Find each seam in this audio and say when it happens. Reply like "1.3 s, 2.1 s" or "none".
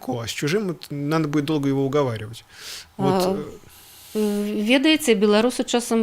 none